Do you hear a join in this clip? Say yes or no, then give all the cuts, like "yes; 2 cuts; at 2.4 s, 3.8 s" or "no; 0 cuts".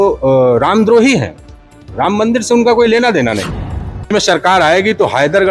yes; 1 cut; at 4.1 s